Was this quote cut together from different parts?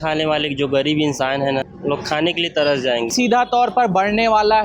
yes; 2 cuts; at 1.7 s, 3.1 s

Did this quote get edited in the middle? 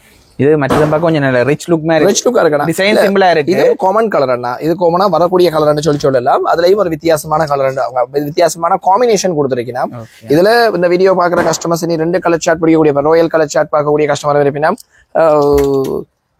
no; 0 cuts

